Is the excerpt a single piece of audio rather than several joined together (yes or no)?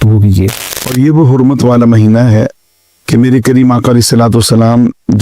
no